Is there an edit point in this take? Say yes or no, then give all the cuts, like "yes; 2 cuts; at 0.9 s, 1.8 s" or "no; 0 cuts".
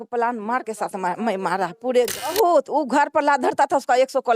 yes; 1 cut; at 2.3 s